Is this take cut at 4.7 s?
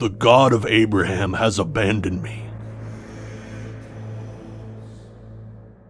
no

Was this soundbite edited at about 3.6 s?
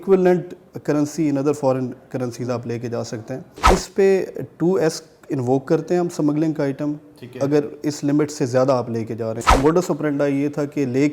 yes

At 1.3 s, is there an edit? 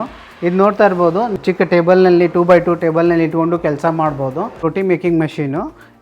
yes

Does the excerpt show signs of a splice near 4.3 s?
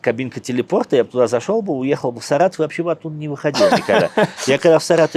no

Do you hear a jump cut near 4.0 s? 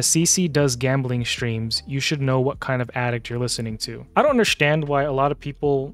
yes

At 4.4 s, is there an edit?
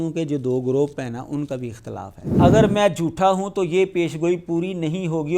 no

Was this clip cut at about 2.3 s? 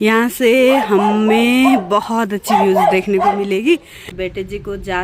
no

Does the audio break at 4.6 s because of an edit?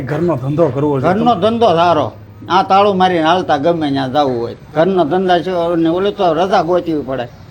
yes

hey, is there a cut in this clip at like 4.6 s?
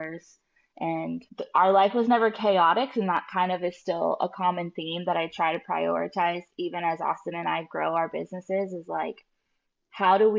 no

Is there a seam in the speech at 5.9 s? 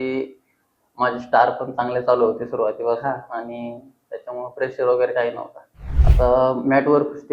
yes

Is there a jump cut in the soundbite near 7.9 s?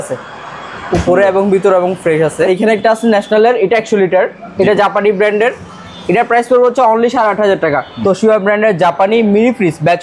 yes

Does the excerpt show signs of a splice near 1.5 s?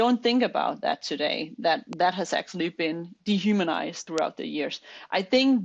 no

